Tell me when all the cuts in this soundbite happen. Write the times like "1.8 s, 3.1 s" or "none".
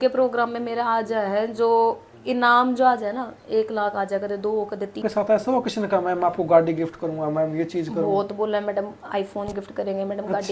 5.0 s